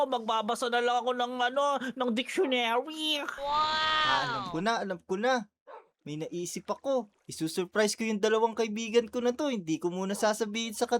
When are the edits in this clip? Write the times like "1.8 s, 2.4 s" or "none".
4.0 s